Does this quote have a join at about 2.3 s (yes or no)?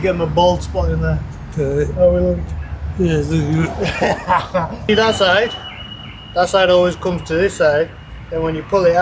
no